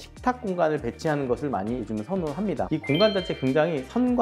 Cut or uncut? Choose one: cut